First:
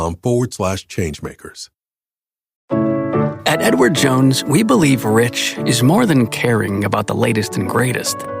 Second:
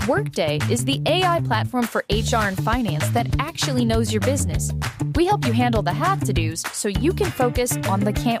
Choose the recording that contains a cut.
first; 1 cut; at 2.5 s

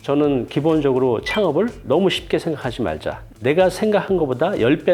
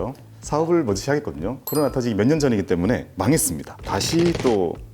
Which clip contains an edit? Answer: second; 1 cut; at 1.6 s

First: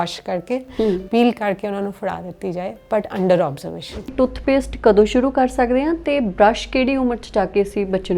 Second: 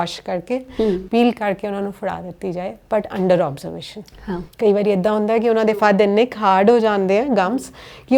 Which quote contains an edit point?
first; 1 cut; at 4.1 s

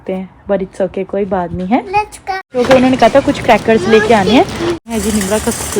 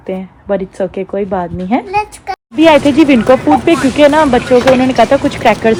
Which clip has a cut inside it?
first; 2 cuts; at 2.5 s, 4.8 s

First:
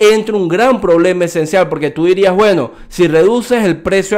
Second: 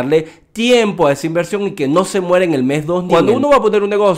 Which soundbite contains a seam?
second; 1 cut; at 3.0 s

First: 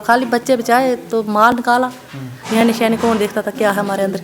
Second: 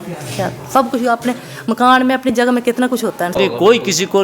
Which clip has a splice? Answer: second; 1 cut; at 3.3 s

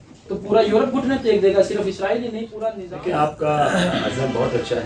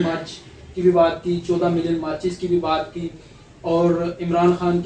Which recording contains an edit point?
first; 1 cut; at 2.4 s

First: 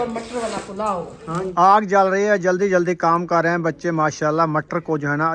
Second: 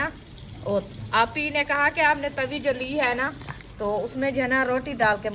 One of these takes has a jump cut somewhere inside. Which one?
first; 1 cut; at 1.5 s

